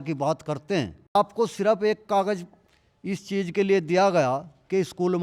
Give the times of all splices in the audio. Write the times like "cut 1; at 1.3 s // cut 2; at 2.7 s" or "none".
cut 1; at 1.2 s